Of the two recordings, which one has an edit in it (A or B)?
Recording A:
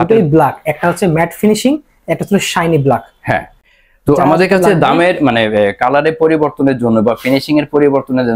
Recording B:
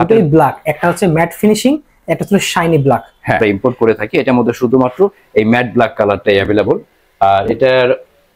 B